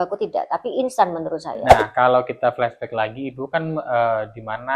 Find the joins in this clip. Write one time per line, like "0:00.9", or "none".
0:01.5

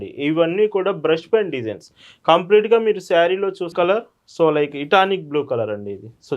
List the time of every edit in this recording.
0:03.7

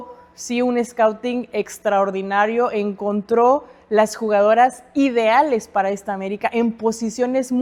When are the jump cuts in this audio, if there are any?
none

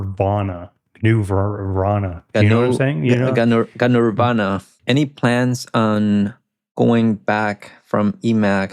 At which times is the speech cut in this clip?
0:04.7

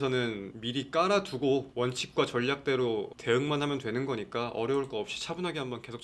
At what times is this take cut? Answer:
none

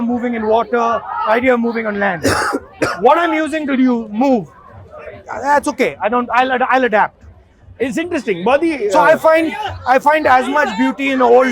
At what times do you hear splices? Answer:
none

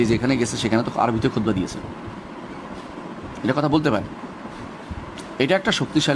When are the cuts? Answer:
none

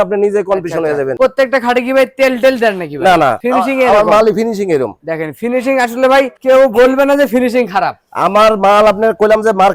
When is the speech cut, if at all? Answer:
none

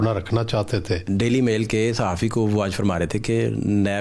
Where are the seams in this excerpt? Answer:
0:01.0

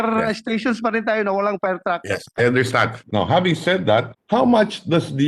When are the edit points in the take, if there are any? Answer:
0:03.0
0:04.2

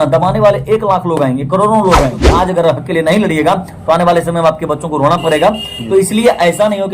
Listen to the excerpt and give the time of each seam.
0:02.2

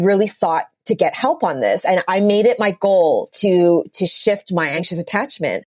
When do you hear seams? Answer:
0:04.8

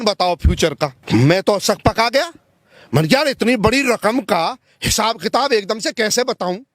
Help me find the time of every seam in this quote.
0:01.0

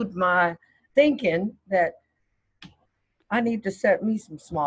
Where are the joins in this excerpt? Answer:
none

